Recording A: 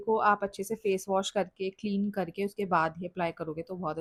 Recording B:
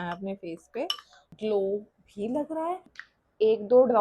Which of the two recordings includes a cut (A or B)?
B